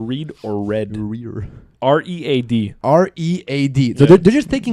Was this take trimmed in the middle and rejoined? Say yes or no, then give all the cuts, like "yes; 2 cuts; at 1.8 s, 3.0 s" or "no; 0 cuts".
no; 0 cuts